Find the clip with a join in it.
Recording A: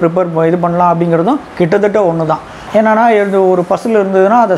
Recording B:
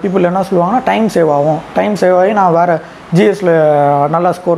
A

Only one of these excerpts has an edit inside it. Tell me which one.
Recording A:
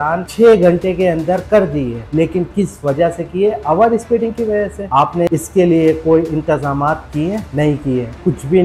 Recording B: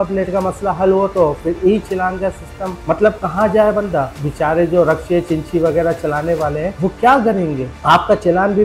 A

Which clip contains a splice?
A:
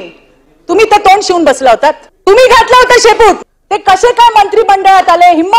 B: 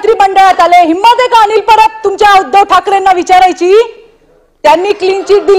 A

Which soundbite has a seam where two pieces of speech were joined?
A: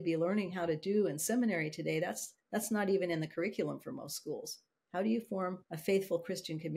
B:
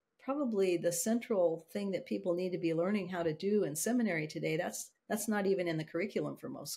A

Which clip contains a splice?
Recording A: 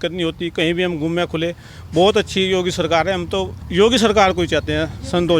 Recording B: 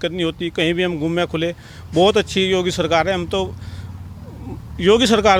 A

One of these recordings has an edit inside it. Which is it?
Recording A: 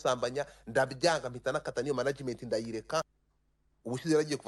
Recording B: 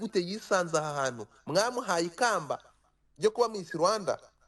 A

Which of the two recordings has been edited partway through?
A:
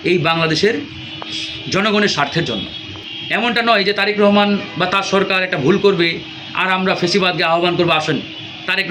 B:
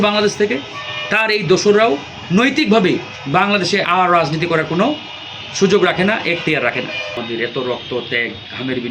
B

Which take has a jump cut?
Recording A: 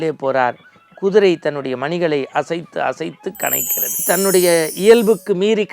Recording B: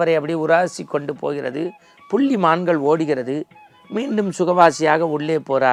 A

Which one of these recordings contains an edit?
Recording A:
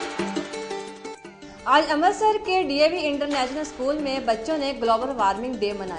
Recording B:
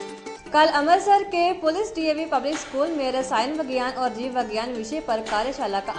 A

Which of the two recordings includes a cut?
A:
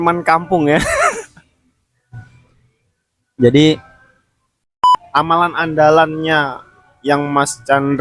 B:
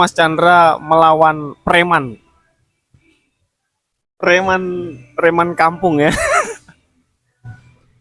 A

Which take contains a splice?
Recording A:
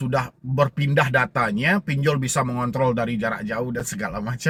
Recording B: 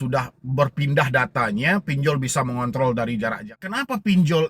B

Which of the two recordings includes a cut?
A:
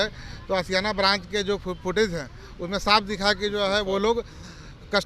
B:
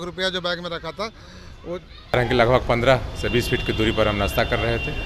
B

